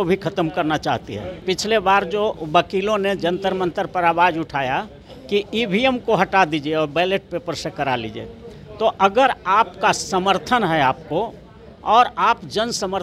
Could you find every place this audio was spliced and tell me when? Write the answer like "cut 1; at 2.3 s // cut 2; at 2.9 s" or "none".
cut 1; at 1.4 s